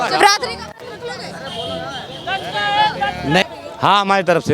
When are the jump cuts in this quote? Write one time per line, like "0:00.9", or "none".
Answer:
0:03.4